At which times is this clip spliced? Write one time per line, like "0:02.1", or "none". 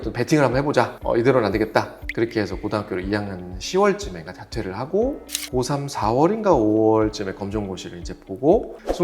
0:02.0